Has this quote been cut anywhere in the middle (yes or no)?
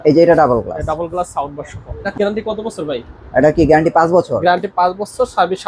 yes